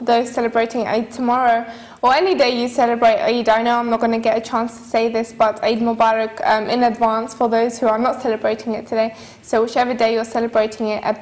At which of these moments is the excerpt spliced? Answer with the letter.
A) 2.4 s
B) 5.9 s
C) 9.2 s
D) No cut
B